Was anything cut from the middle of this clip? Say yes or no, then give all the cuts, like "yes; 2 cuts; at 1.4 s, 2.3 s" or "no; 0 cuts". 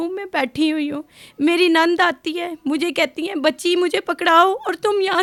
no; 0 cuts